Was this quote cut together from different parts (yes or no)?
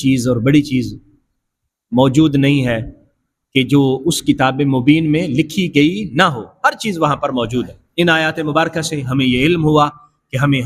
yes